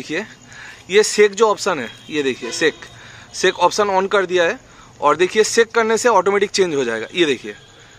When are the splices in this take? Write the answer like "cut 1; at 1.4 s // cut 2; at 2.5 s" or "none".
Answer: none

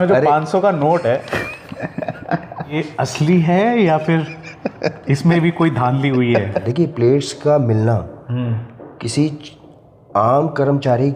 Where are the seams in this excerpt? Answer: cut 1; at 2.7 s // cut 2; at 6.7 s

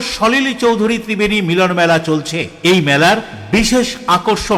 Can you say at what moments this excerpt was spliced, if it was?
none

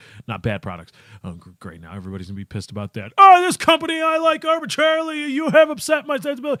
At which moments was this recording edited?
none

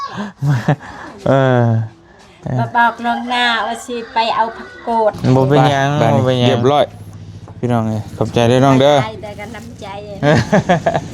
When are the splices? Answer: cut 1; at 6.5 s

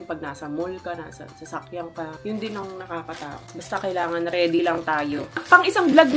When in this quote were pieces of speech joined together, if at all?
cut 1; at 3.5 s // cut 2; at 5.4 s

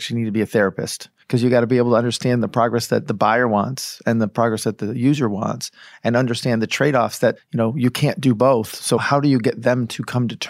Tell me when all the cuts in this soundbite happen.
cut 1; at 7.4 s // cut 2; at 9.0 s

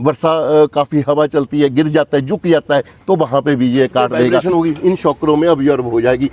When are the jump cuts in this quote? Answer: cut 1; at 4.4 s

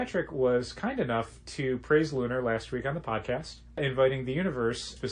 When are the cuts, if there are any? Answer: cut 1; at 3.8 s

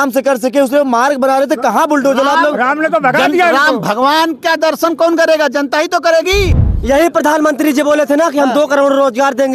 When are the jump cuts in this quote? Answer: cut 1; at 6.6 s

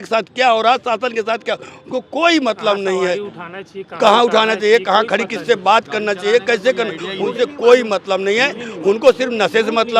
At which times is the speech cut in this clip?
none

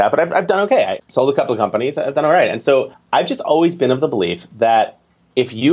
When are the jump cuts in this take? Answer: cut 1; at 1.0 s // cut 2; at 3.0 s

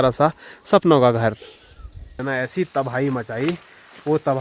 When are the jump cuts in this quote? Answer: cut 1; at 2.2 s

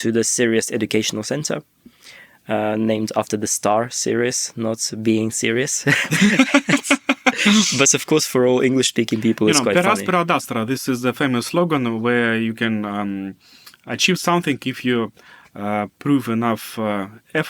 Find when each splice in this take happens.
none

